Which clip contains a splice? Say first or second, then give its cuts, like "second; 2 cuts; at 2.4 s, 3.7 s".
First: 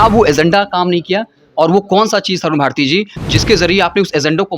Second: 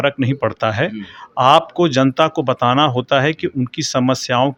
first; 1 cut; at 3.2 s